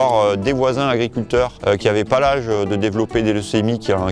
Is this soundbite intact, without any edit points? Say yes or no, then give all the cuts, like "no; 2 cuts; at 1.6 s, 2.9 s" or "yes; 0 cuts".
no; 1 cut; at 1.6 s